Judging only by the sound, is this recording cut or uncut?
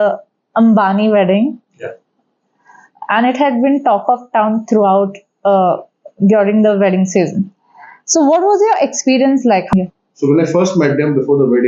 cut